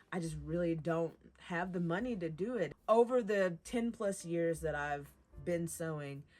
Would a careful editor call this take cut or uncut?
cut